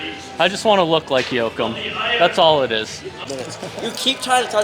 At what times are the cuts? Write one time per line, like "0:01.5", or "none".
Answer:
0:03.3